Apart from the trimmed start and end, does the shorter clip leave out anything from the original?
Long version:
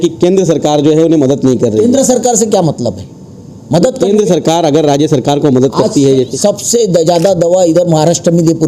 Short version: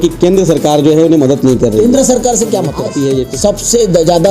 yes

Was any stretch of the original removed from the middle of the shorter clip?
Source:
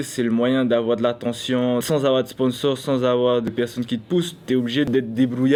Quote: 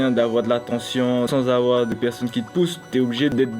yes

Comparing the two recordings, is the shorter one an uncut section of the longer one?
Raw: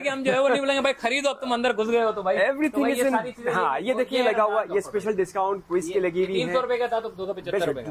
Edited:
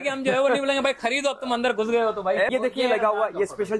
no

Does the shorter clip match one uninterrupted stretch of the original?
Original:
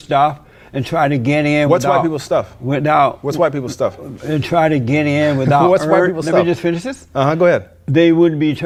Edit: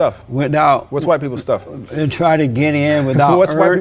yes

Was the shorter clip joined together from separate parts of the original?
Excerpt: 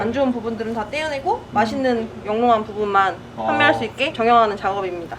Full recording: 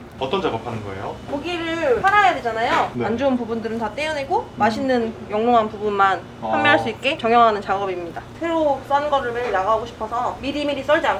no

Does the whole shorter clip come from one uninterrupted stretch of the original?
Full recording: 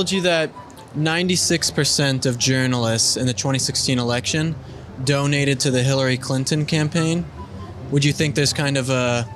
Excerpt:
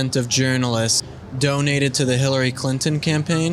no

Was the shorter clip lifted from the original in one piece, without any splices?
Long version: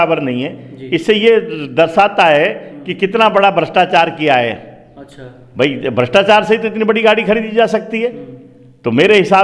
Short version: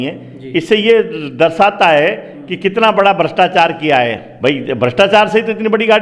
no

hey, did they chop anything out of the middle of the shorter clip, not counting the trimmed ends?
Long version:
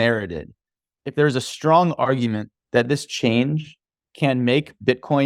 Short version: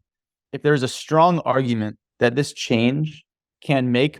no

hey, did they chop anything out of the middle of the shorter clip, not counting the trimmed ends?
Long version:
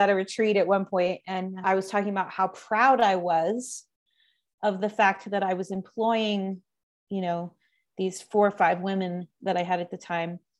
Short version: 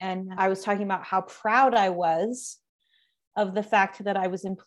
no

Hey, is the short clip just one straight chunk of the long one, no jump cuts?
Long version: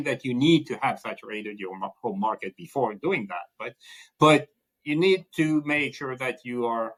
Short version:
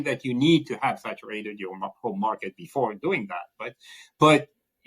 yes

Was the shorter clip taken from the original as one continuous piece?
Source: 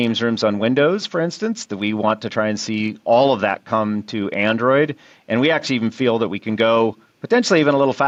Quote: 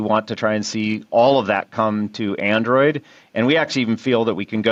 yes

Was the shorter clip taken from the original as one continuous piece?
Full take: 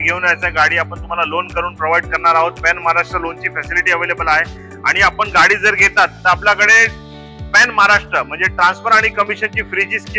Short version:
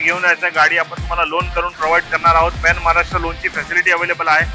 yes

